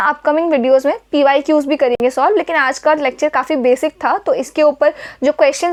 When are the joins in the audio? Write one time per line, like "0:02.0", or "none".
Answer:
none